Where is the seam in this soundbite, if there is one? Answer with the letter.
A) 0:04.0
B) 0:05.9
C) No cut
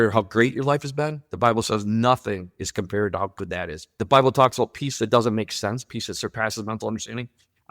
A